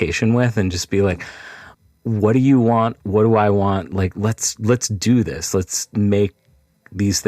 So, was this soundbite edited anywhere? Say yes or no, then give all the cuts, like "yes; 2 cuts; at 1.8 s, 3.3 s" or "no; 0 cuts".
yes; 1 cut; at 1.7 s